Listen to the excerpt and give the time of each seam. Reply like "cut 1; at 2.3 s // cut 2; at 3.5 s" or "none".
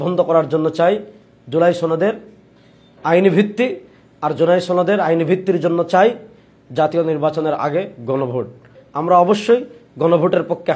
cut 1; at 8.8 s